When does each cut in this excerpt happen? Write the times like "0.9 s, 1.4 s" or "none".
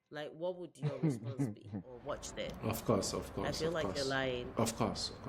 2.0 s